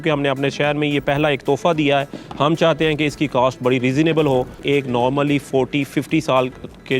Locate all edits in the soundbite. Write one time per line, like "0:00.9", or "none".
0:04.6